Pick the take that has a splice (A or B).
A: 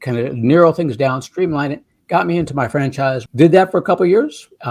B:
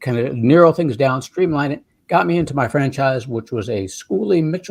A